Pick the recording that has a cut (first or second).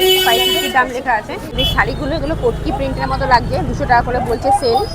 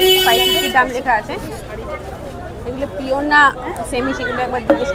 first